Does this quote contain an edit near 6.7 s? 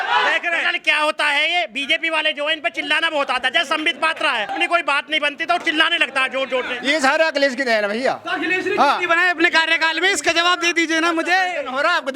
yes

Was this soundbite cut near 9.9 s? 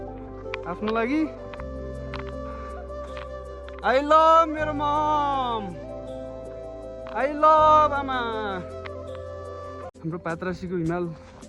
yes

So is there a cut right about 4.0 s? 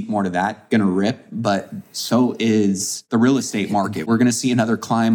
yes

